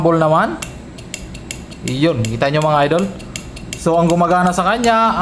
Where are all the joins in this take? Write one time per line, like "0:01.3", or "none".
none